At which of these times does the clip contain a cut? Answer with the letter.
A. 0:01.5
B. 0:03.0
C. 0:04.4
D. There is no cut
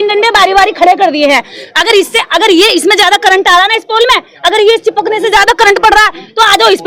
D